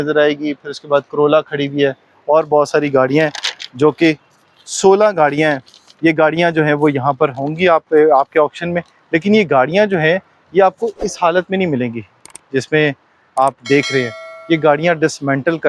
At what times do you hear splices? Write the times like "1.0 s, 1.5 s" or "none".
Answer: none